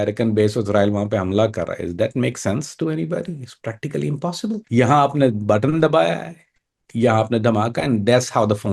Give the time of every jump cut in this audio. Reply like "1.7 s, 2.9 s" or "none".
4.6 s